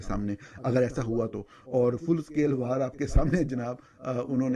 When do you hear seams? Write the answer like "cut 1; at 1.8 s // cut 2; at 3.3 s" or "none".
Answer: none

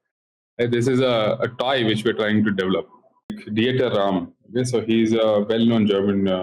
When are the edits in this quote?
cut 1; at 3.4 s

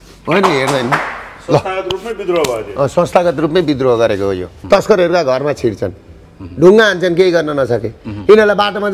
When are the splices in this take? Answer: cut 1; at 4.5 s

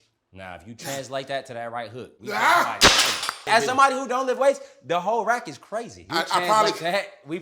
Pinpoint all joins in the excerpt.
cut 1; at 3.4 s // cut 2; at 6.0 s

